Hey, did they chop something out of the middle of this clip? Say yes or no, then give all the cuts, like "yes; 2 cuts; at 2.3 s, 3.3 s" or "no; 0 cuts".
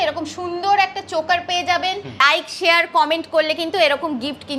yes; 1 cut; at 2.2 s